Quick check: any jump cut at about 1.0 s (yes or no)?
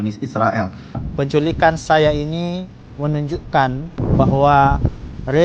yes